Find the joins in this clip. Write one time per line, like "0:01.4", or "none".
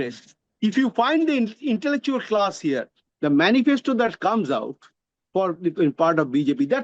0:03.0